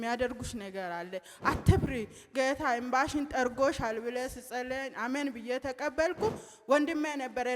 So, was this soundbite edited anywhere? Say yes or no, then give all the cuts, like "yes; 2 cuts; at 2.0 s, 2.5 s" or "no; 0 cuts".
no; 0 cuts